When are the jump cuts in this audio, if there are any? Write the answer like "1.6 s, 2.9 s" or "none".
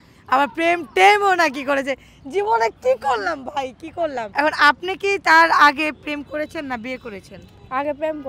4.3 s